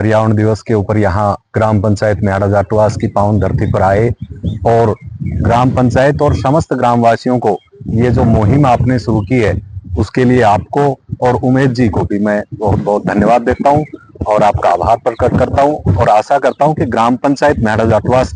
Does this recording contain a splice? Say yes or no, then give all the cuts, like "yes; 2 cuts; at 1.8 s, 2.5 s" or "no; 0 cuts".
no; 0 cuts